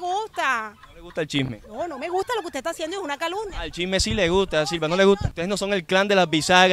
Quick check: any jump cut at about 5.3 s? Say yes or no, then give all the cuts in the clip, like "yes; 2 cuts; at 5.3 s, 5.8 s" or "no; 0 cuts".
yes; 1 cut; at 5.3 s